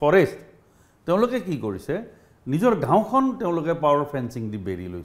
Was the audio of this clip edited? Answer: no; 0 cuts

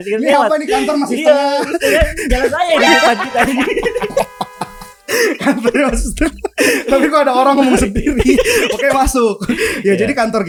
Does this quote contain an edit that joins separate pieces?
no; 0 cuts

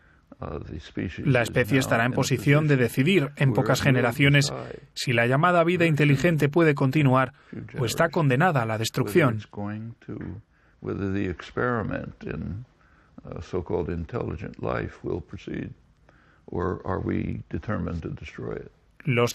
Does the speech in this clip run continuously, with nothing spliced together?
yes; 0 cuts

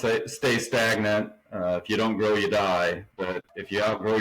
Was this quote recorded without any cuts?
no; 2 cuts; at 1.4 s, 3.2 s

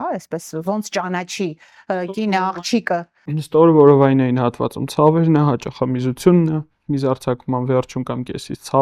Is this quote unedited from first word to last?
yes; 0 cuts

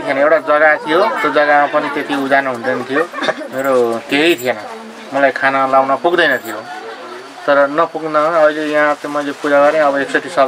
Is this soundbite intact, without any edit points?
yes; 0 cuts

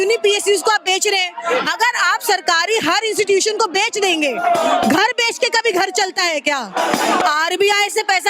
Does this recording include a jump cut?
no; 0 cuts

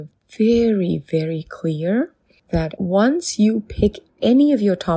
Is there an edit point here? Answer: yes; 1 cut; at 4.0 s

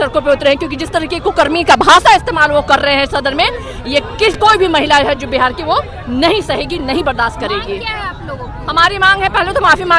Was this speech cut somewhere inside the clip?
no; 0 cuts

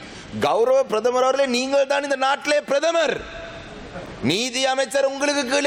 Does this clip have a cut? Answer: no; 0 cuts

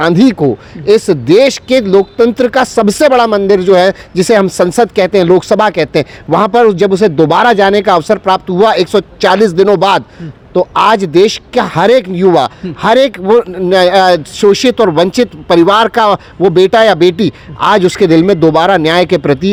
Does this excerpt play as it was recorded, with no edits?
yes; 0 cuts

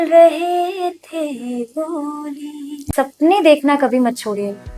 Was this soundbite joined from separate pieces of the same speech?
yes; 1 cut; at 2.9 s

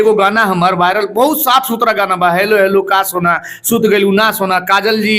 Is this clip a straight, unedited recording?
yes; 0 cuts

